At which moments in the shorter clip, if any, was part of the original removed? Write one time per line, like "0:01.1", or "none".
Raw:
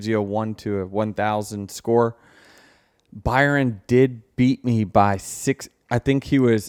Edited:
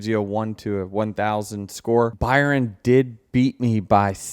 0:02.1